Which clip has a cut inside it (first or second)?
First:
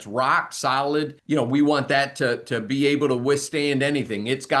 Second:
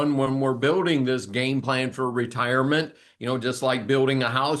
first